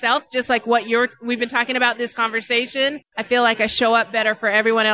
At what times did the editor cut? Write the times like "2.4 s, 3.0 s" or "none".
3.1 s

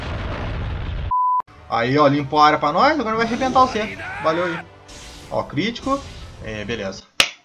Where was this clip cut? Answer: 1.5 s

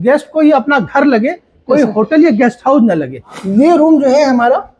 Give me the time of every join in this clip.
3.2 s

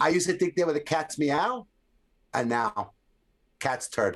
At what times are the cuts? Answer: none

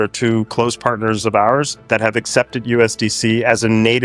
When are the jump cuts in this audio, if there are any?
none

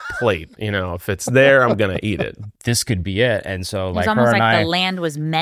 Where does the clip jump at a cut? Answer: 2.4 s

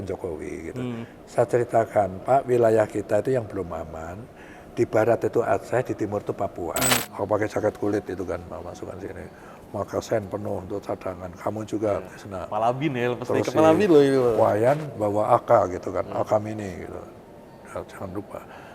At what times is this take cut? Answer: 7.1 s

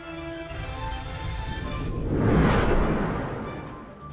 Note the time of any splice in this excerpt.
none

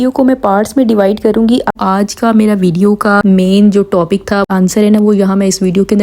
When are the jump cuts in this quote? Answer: 1.7 s, 4.5 s

